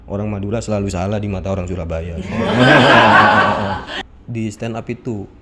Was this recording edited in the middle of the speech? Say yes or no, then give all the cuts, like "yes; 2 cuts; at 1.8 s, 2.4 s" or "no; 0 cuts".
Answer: yes; 1 cut; at 3.9 s